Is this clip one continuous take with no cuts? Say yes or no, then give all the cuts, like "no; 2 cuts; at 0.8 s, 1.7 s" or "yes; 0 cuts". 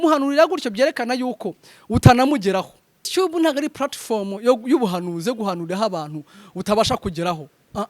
no; 1 cut; at 3.1 s